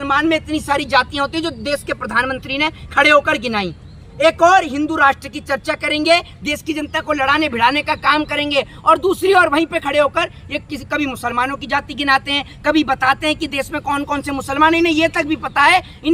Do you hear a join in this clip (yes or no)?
no